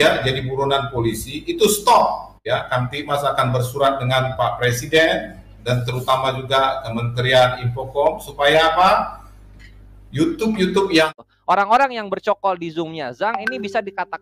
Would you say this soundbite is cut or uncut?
cut